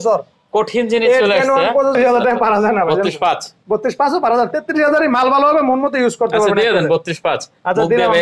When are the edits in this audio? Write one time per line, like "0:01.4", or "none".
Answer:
0:01.9